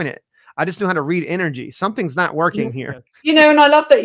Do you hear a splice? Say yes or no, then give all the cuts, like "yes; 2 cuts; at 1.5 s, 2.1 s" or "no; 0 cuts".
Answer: yes; 1 cut; at 3.1 s